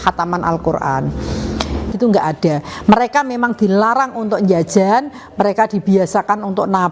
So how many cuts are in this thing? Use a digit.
1